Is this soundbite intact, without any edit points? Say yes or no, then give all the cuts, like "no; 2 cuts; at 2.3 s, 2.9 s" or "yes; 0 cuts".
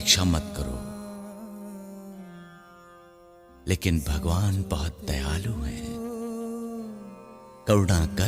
yes; 0 cuts